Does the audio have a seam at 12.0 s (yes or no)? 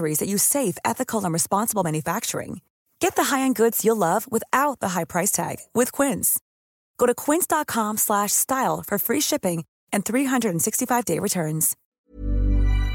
yes